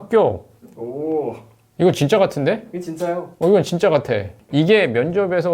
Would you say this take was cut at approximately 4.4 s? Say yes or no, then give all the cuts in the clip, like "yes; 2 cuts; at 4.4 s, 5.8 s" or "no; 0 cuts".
yes; 1 cut; at 4.4 s